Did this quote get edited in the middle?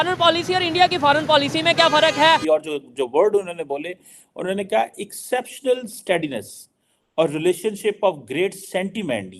yes; 1 cut; at 2.4 s

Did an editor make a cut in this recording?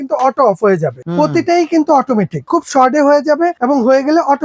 yes; 3 cuts; at 0.9 s, 2.5 s, 3.6 s

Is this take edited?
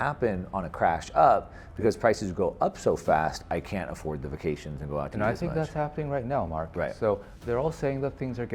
yes; 1 cut; at 7.3 s

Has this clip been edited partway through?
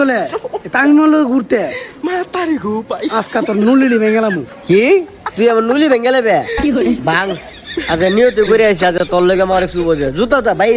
no; 0 cuts

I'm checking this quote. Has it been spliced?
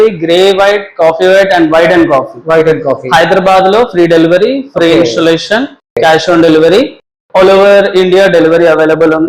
no; 0 cuts

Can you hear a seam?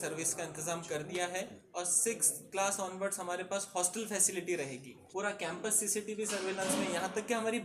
yes; 2 cuts; at 1.6 s, 4.9 s

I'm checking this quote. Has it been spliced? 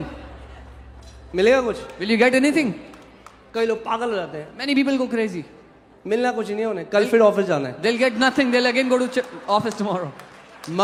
no; 0 cuts

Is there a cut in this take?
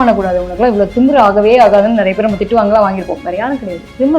no; 0 cuts

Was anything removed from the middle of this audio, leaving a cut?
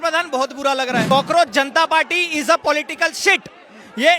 yes; 1 cut; at 1.0 s

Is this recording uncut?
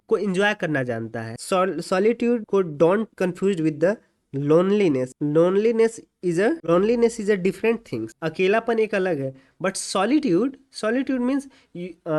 yes; 0 cuts

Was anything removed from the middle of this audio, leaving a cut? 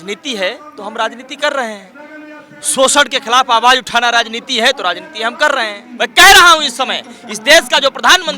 yes; 1 cut; at 5.8 s

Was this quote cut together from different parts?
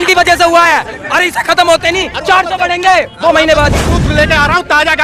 yes; 1 cut; at 3.9 s

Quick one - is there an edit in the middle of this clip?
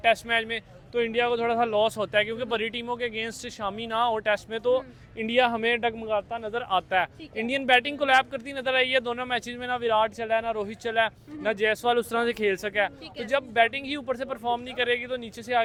no; 0 cuts

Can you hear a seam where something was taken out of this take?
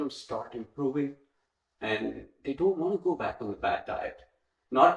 no; 0 cuts

